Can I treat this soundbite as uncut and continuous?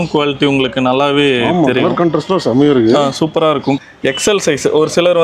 no; 1 cut; at 3.8 s

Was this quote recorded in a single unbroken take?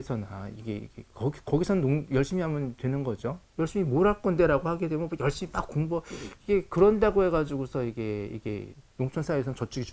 no; 2 cuts; at 3.4 s, 8.8 s

